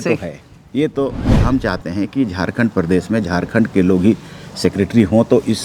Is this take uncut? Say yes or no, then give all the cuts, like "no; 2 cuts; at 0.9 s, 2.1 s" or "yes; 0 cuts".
no; 1 cut; at 1.3 s